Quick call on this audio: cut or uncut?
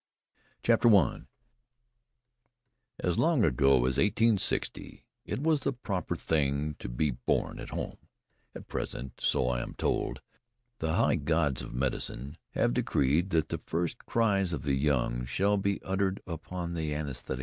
uncut